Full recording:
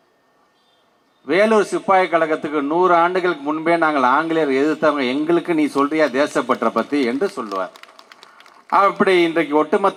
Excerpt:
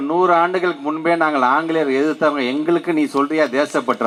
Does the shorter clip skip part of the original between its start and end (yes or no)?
no